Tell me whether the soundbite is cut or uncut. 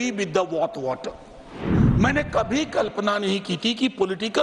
cut